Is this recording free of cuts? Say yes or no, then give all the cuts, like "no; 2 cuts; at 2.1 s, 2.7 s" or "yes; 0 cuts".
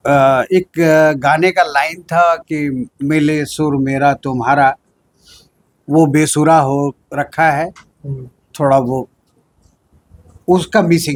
yes; 0 cuts